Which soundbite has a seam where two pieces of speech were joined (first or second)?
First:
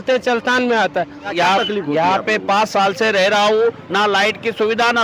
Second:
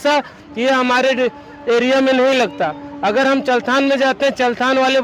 first